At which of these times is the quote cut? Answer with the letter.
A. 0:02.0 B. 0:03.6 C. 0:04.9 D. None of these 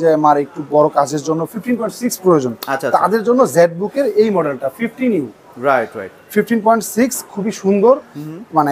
D